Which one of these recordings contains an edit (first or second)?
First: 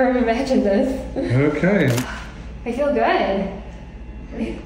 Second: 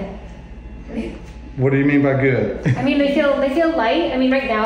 first